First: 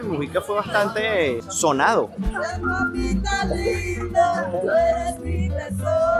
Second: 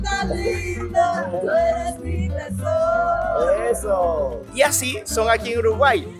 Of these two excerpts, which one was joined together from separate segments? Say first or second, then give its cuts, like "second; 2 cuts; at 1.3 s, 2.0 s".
first; 1 cut; at 2.1 s